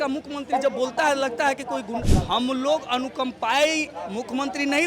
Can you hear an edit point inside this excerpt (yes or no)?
yes